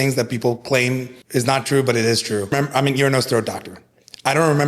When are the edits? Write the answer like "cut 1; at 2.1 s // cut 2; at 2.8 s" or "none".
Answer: cut 1; at 1.1 s // cut 2; at 2.5 s